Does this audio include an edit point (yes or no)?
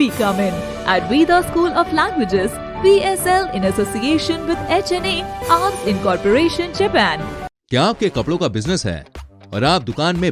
yes